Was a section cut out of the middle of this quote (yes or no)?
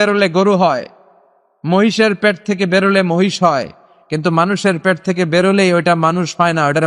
no